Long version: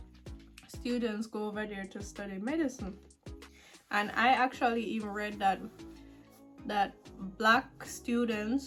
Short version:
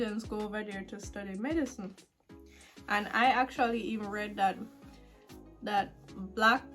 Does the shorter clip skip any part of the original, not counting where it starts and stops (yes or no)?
no